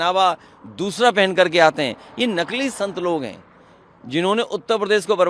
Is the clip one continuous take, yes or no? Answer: yes